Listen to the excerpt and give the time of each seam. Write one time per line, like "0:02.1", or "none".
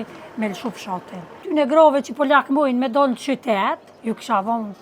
0:01.4
0:03.9